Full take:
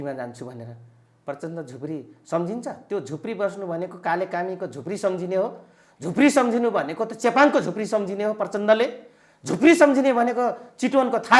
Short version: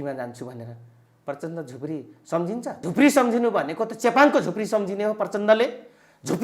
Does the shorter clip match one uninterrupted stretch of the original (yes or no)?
no